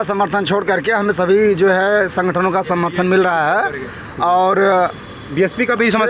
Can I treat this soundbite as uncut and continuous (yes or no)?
yes